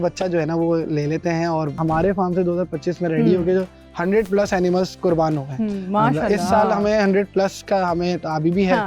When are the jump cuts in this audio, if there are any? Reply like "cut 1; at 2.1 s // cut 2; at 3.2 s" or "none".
cut 1; at 1.8 s